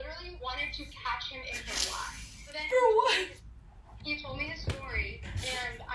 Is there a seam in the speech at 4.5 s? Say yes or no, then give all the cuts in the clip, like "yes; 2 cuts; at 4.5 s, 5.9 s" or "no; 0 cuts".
no; 0 cuts